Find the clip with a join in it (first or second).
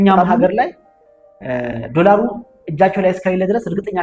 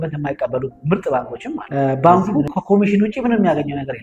second